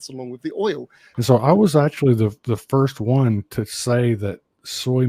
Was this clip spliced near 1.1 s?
yes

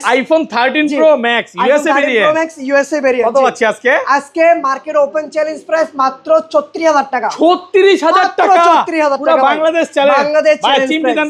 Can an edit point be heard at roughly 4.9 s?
no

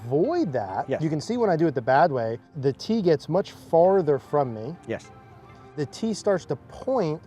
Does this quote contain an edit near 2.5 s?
yes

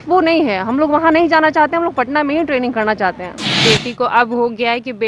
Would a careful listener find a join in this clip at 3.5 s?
yes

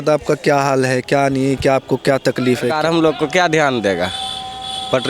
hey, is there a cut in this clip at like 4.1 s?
no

